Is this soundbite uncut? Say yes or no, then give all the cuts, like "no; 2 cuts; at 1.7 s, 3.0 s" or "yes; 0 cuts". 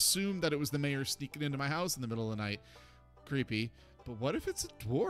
no; 1 cut; at 3.9 s